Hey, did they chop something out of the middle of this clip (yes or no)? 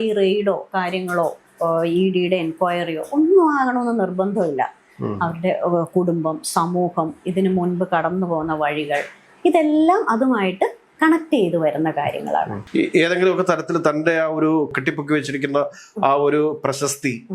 no